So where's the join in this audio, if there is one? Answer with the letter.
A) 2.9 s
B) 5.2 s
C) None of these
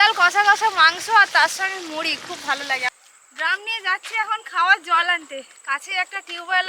A